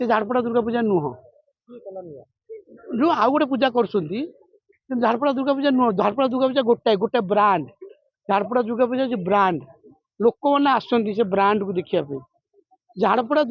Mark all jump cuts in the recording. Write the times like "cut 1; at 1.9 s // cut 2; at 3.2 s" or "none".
none